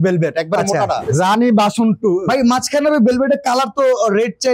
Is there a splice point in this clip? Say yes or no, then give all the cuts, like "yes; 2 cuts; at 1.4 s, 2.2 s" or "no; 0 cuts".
yes; 2 cuts; at 1.0 s, 2.2 s